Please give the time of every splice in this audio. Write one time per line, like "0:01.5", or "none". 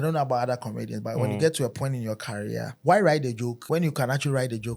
0:02.7
0:03.6